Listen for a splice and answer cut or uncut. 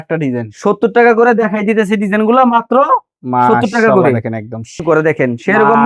cut